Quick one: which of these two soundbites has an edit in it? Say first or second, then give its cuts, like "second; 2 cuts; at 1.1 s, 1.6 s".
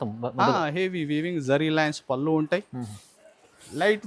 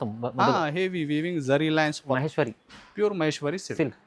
second; 1 cut; at 2.2 s